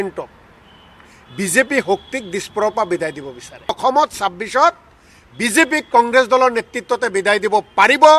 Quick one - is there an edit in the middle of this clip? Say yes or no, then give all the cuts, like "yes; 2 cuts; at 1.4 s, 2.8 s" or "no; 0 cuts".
yes; 1 cut; at 3.8 s